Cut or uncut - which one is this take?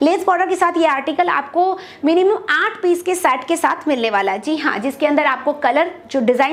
uncut